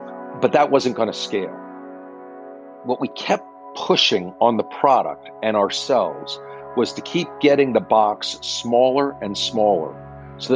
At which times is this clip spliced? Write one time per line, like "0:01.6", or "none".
none

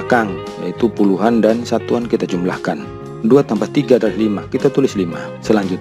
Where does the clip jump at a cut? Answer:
none

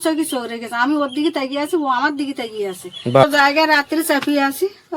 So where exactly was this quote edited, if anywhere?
0:03.2

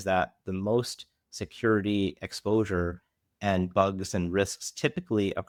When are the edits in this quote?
none

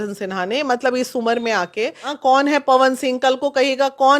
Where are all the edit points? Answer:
0:02.0

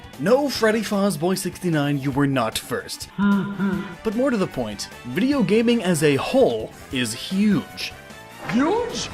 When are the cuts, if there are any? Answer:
0:03.1

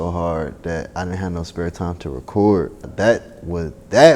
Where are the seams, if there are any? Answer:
0:02.8

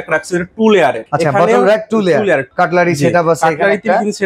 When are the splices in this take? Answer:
0:01.0
0:02.5

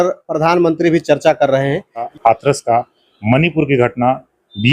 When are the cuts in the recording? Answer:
0:02.1

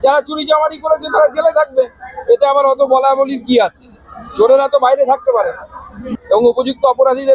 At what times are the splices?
0:06.0

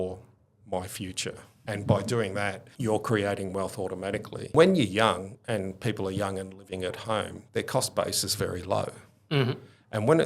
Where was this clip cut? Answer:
0:01.6
0:02.7
0:04.5

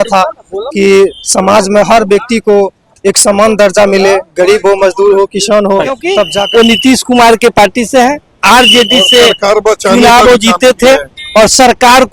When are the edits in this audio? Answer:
0:06.4

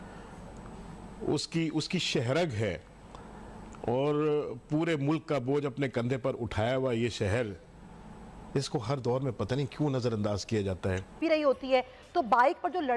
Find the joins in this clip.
0:11.2

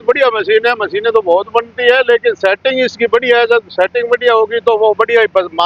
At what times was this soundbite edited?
none

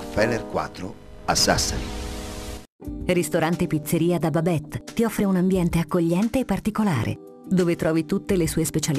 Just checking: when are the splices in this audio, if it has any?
0:02.4

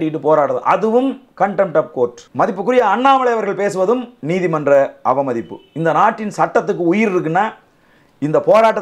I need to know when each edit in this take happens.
0:02.2

